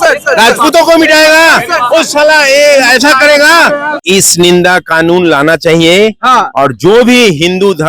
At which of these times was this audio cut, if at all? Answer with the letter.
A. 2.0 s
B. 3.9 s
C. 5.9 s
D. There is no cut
B